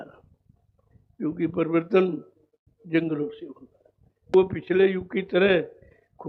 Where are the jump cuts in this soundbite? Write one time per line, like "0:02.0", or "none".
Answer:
0:04.3